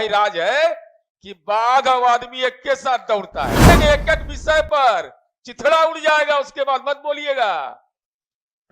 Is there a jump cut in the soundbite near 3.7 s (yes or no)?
yes